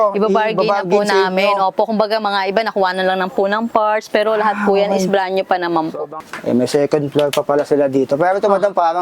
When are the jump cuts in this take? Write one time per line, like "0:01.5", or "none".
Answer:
0:06.1